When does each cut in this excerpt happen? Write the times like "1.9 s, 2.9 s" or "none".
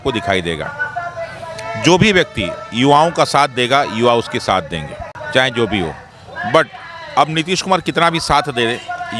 5.1 s